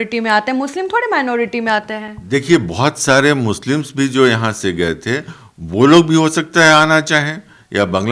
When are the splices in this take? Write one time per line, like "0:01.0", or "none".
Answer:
none